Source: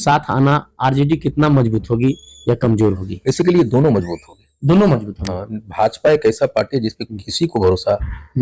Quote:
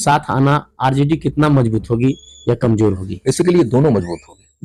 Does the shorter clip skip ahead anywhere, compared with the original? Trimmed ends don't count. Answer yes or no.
no